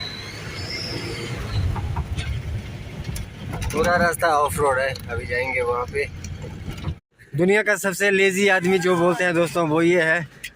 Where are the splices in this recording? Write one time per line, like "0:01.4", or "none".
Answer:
0:07.1